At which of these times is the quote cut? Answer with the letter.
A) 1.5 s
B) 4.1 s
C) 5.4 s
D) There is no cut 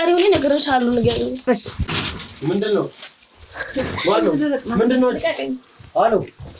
A